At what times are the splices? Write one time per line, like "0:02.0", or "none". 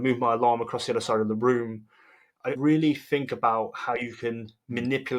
0:02.6